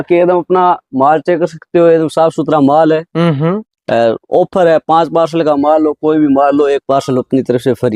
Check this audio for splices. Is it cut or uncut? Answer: uncut